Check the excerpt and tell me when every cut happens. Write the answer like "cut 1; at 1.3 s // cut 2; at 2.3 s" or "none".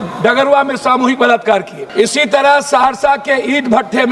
cut 1; at 1.8 s